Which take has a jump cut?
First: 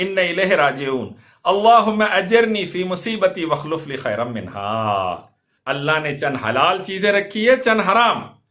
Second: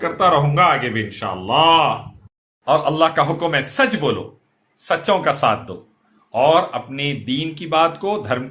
first; 1 cut; at 5.5 s

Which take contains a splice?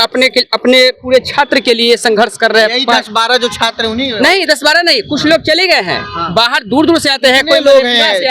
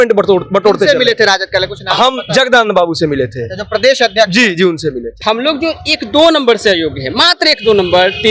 second; 1 cut; at 5.1 s

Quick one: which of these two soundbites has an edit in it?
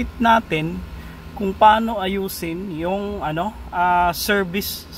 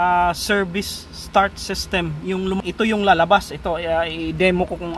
second; 1 cut; at 2.6 s

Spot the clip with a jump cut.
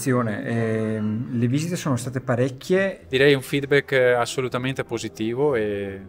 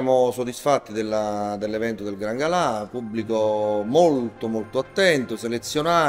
first; 1 cut; at 3.0 s

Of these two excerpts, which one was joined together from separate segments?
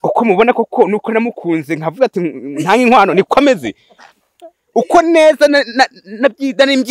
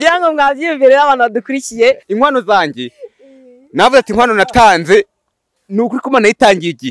second; 1 cut; at 2.0 s

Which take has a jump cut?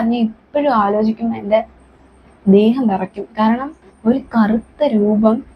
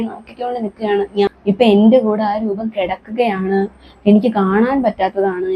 second; 1 cut; at 1.3 s

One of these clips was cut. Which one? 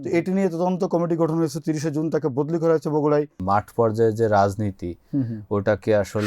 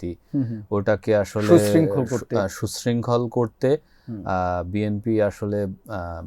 first; 1 cut; at 3.4 s

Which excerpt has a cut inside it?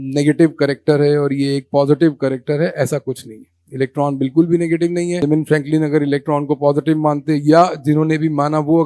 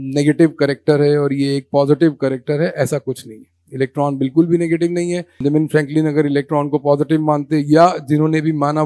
first; 1 cut; at 5.2 s

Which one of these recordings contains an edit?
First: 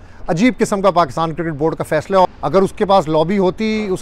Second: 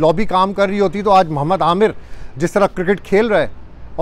first; 1 cut; at 2.2 s

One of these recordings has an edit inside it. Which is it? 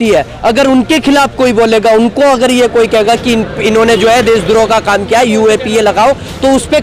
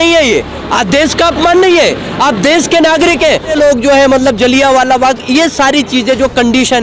second; 1 cut; at 3.5 s

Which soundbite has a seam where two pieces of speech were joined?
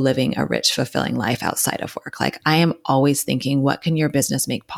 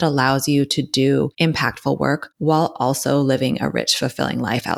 second; 2 cuts; at 1.3 s, 2.3 s

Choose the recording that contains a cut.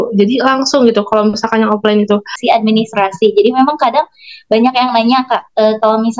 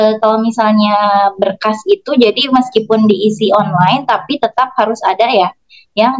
first; 1 cut; at 2.4 s

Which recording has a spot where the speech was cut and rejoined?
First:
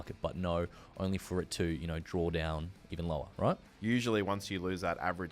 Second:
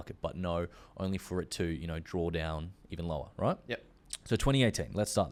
first; 1 cut; at 3.7 s

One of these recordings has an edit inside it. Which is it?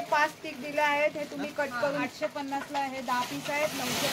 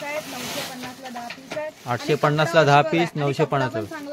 first; 1 cut; at 2.1 s

